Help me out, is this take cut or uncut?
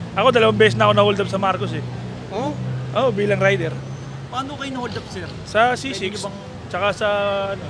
uncut